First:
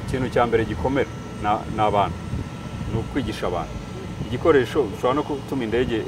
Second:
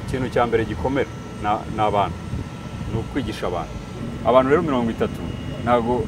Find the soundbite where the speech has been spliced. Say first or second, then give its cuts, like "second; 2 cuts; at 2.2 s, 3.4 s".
second; 1 cut; at 4.0 s